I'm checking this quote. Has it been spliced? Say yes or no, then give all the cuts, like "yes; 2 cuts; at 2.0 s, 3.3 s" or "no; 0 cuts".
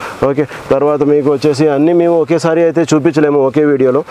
no; 0 cuts